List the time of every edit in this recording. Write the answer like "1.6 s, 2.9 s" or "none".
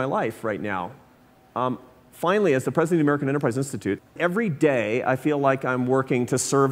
4.1 s